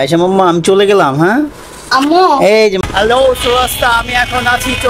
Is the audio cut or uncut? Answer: cut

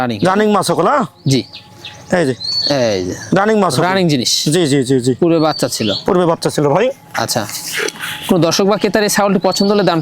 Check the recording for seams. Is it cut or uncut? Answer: uncut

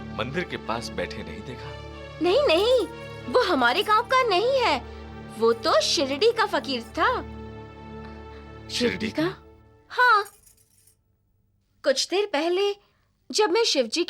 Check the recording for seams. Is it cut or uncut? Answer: uncut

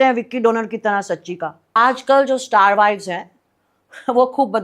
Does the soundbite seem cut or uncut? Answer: cut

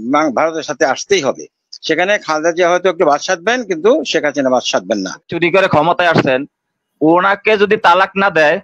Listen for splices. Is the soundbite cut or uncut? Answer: cut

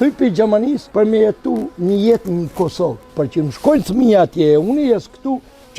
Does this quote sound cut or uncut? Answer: cut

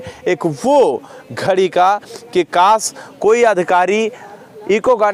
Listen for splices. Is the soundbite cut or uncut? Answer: uncut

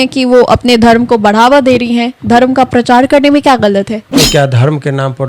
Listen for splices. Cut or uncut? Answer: cut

